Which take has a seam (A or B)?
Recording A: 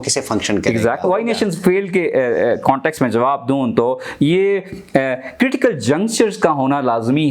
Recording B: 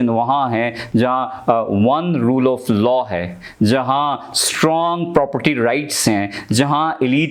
A